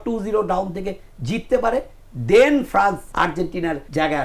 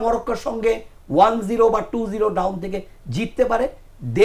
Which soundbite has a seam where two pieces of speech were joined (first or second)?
first